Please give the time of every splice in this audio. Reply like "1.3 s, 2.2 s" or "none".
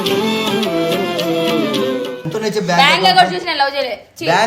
2.1 s